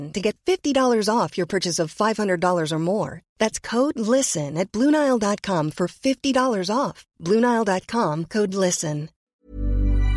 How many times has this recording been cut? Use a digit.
1